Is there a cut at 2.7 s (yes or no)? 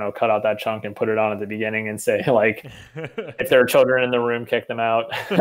no